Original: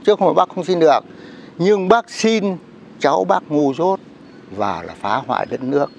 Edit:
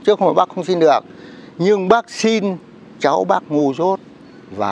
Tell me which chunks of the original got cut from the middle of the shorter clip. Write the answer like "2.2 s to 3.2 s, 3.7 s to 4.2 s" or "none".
none